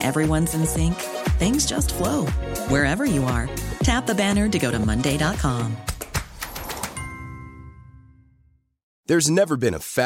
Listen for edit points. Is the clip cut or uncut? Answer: uncut